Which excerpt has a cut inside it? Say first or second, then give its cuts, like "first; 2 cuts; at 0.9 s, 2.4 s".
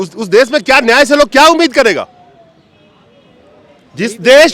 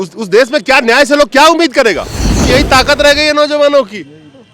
second; 1 cut; at 2.5 s